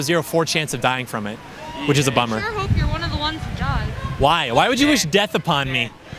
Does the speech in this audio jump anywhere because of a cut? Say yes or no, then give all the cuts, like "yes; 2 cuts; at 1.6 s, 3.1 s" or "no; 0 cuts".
no; 0 cuts